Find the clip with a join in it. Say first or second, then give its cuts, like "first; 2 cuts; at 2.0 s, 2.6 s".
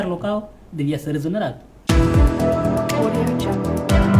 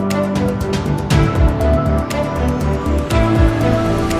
first; 1 cut; at 1.7 s